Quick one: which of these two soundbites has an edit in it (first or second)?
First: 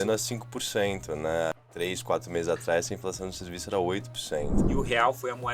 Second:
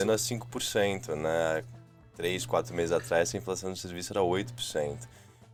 first